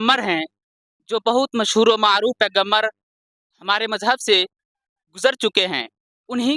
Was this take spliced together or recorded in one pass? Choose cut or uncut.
uncut